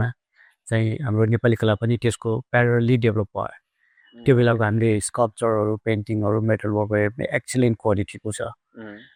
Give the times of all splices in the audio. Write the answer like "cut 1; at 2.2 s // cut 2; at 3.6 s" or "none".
none